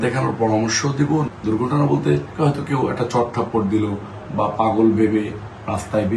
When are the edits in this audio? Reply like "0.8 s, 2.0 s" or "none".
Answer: 1.3 s, 2.3 s